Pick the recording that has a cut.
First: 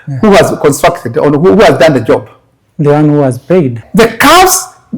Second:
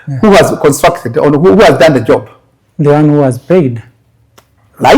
first; 1 cut; at 3.8 s

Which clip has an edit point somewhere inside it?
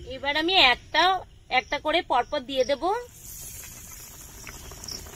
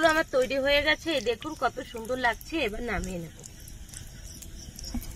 first; 1 cut; at 4.2 s

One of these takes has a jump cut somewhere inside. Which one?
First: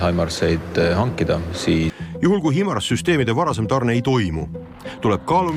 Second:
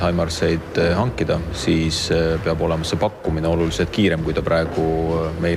first; 1 cut; at 2.0 s

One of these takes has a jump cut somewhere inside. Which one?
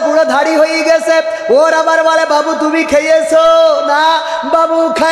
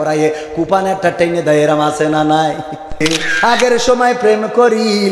second; 1 cut; at 3.0 s

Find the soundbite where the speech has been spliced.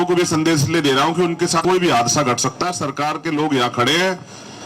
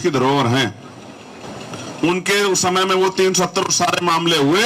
first; 1 cut; at 1.6 s

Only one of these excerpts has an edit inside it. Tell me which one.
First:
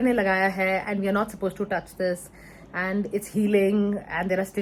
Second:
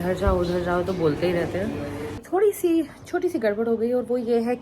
second; 1 cut; at 2.2 s

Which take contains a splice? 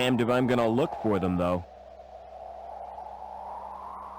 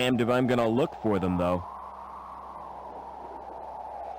first; 1 cut; at 1.6 s

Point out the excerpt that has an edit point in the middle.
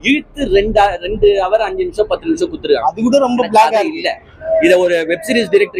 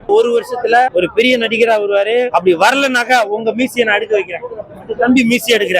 second; 2 cuts; at 0.9 s, 2.3 s

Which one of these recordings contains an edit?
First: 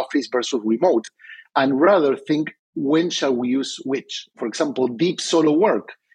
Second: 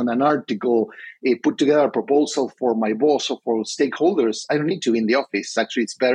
first; 1 cut; at 4.4 s

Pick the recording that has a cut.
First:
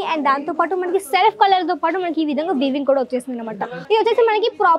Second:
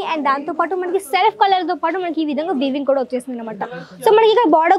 first; 1 cut; at 3.7 s

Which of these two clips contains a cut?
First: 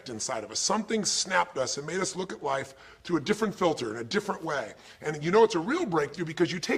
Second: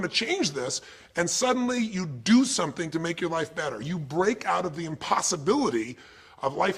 first; 1 cut; at 2.0 s

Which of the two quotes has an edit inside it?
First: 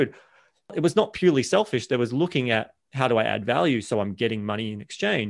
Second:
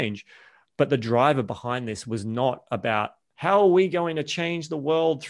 second; 1 cut; at 3.2 s

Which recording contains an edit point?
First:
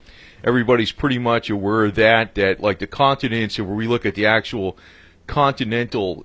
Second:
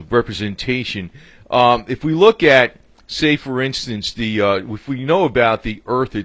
first; 1 cut; at 3.4 s

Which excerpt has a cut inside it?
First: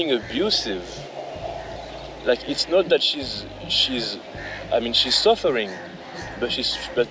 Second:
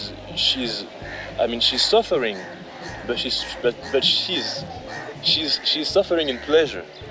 second; 1 cut; at 5.2 s

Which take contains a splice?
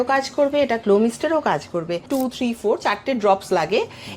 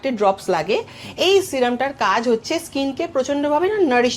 first; 1 cut; at 2.1 s

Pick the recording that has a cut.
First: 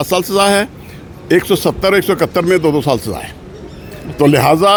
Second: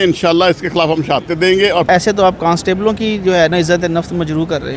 second; 1 cut; at 1.9 s

